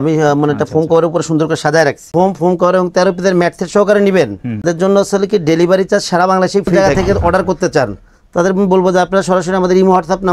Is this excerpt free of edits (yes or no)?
no